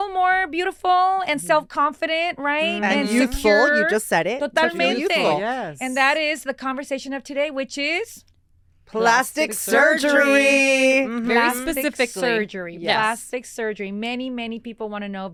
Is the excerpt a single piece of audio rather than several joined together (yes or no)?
yes